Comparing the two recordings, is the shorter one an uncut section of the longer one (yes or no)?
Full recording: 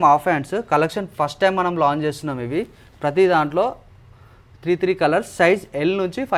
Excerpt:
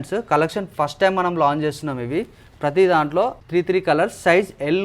no